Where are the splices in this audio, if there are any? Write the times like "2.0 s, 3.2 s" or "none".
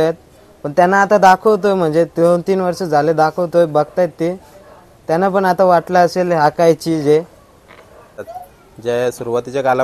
8.2 s